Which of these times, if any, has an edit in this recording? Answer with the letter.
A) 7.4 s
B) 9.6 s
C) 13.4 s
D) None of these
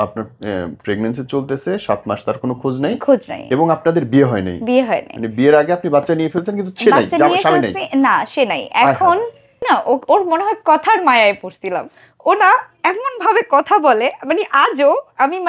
B